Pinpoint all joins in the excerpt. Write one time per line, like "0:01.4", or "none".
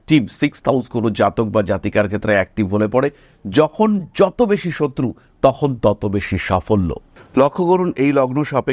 0:07.1